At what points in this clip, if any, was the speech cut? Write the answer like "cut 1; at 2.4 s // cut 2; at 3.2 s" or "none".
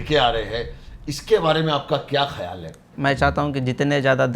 cut 1; at 2.9 s